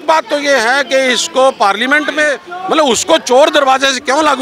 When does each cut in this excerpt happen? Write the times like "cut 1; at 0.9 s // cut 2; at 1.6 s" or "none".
cut 1; at 2.5 s